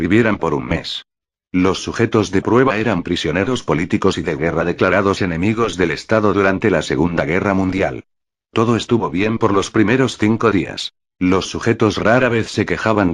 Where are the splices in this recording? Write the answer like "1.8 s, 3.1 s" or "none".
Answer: 8.3 s